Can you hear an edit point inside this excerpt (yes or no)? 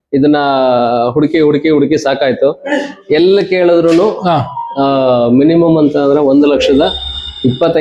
no